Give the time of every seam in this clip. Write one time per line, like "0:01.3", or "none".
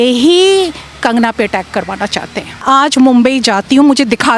0:02.6

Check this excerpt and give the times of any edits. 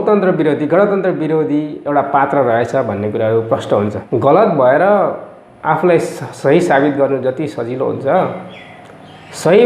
0:04.0

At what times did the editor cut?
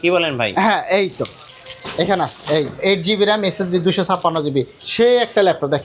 0:02.8
0:04.8

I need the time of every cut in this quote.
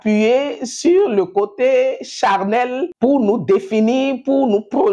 0:02.9

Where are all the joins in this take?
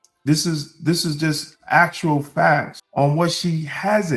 0:02.8

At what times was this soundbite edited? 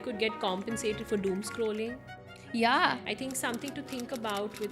0:03.0

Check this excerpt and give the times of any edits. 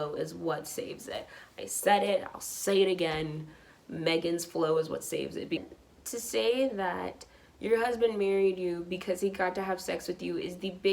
0:05.6

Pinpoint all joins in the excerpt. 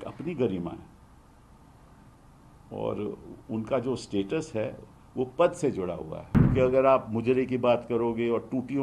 0:06.5

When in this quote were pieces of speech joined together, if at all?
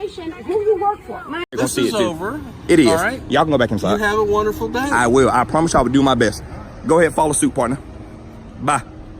0:01.5

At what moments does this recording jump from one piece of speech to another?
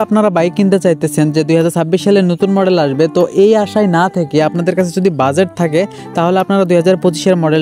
none

